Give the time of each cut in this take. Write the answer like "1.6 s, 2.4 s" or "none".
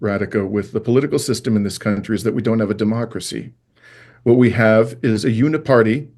none

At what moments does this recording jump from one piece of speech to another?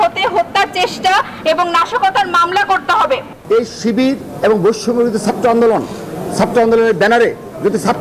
3.3 s

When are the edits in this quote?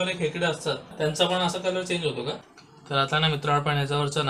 0.9 s, 2.4 s

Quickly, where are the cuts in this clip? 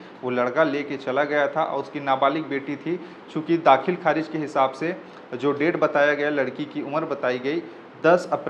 none

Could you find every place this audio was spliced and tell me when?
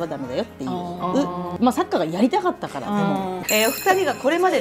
1.5 s, 3.4 s

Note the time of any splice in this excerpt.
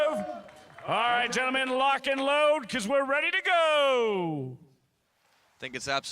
2.4 s

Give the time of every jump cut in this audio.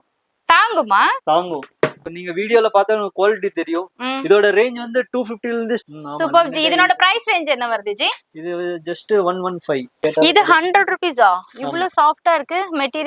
2.1 s, 5.8 s, 9.9 s

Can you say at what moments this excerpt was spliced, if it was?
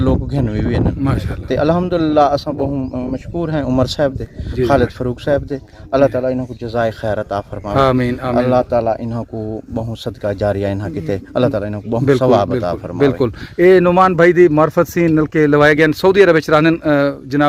none

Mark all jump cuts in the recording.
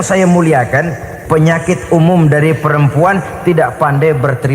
1.1 s

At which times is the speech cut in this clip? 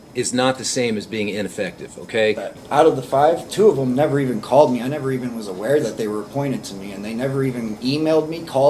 2.5 s

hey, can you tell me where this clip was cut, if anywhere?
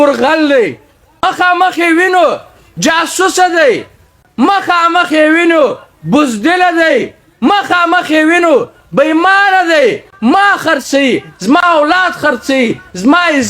1.2 s

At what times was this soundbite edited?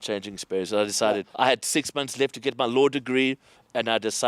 1.3 s

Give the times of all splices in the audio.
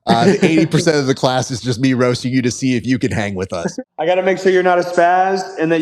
3.7 s

